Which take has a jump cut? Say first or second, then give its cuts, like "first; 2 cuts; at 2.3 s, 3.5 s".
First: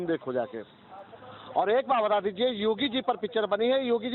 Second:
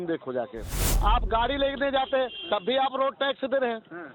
second; 1 cut; at 0.9 s